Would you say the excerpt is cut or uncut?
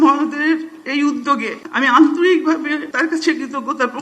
cut